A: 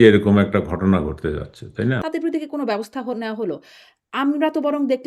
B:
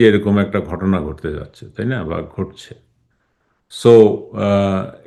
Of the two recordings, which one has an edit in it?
A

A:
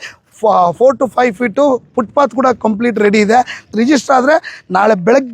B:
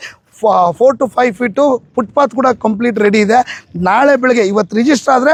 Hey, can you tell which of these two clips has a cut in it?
A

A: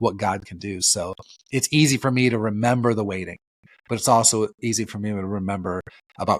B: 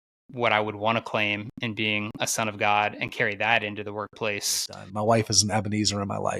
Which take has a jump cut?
B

